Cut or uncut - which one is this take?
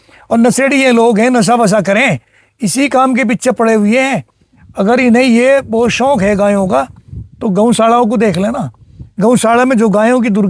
uncut